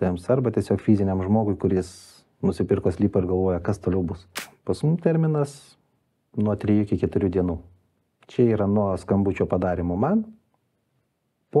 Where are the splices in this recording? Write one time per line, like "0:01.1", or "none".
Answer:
0:04.4